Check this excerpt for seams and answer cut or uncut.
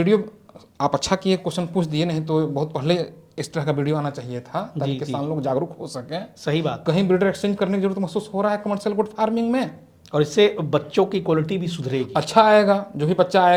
uncut